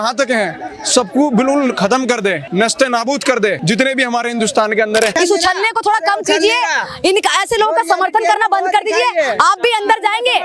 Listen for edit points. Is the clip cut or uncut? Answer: cut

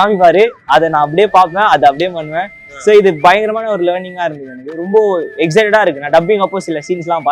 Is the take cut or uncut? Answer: uncut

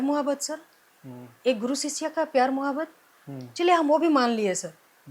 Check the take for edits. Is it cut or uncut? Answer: uncut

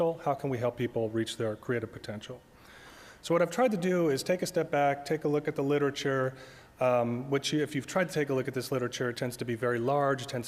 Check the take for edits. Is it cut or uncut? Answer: cut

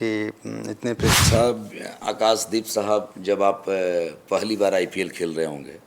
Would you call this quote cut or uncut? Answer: cut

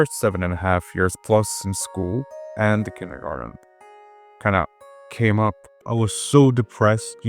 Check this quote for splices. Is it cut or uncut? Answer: cut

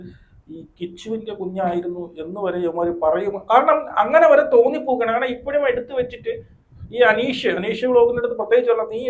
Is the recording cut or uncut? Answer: uncut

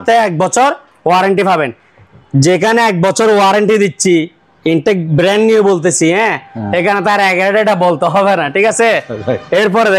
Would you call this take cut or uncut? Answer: uncut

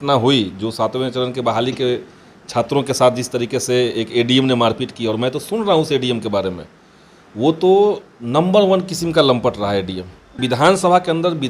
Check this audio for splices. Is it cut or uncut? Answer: cut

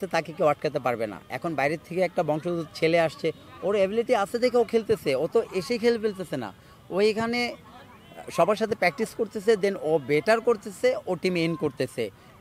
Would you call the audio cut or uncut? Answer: uncut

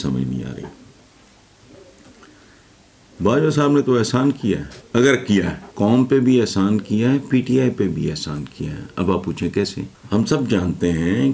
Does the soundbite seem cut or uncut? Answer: cut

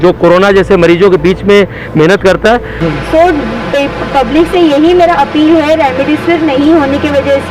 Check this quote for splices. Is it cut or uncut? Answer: cut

